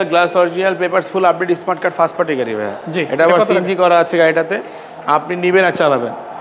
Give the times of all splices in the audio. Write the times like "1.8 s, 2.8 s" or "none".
none

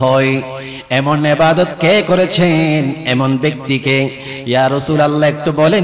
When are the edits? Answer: none

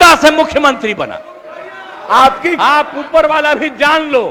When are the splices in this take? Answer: none

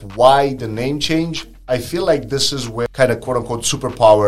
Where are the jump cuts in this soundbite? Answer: 2.8 s

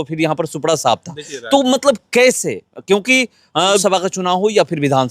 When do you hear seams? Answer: 3.8 s

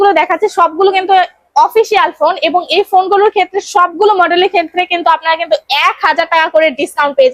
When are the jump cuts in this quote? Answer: none

